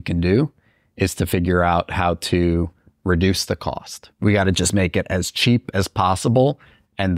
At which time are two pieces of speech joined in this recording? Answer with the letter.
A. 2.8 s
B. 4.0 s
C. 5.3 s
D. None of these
B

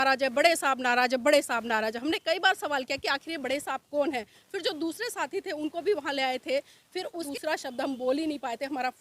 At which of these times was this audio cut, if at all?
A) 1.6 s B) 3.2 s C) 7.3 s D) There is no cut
C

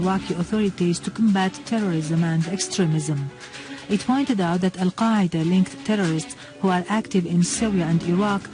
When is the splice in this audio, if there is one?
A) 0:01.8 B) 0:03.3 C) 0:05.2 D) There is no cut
C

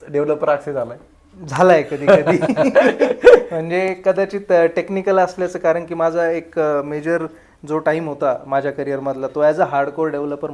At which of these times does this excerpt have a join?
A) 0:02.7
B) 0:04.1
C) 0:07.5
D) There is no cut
D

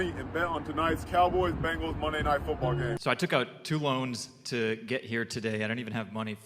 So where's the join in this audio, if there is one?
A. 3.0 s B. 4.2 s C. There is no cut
A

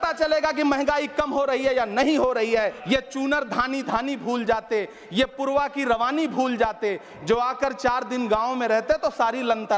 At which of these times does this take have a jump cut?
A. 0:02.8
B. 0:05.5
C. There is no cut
A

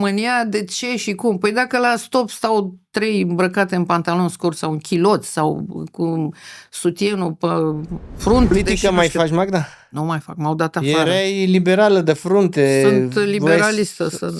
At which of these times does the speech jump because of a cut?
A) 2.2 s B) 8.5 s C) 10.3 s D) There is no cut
B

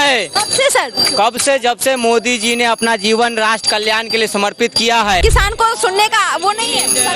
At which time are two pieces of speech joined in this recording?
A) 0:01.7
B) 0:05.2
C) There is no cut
B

